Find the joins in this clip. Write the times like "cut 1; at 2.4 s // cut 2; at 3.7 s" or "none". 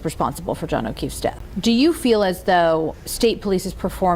cut 1; at 1.5 s // cut 2; at 3.0 s